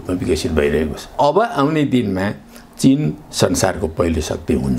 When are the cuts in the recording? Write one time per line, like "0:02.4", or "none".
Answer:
0:01.1